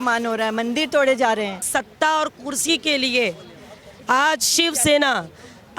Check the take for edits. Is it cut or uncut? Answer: cut